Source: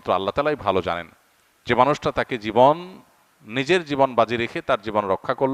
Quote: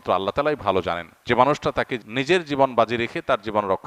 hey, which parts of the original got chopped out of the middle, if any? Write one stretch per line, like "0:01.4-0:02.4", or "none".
0:01.1-0:01.5
0:02.4-0:03.4